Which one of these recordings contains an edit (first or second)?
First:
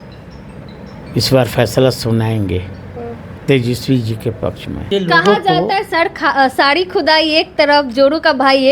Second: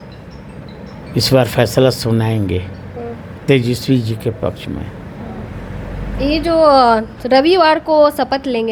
first